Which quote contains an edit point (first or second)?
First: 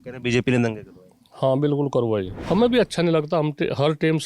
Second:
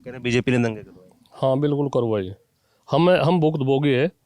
first